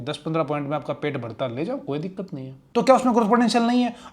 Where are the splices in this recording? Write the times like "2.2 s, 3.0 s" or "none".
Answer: 2.8 s